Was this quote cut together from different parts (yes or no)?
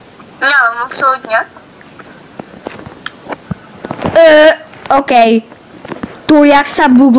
no